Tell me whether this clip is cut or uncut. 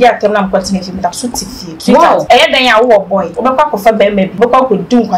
cut